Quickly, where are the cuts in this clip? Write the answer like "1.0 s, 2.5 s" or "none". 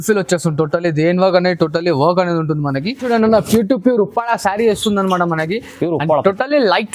3.0 s